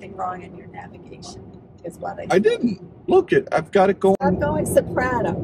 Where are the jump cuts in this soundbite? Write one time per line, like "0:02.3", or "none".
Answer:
none